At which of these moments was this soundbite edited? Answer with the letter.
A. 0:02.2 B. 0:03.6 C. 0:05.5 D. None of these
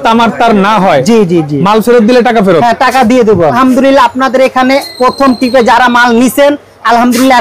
B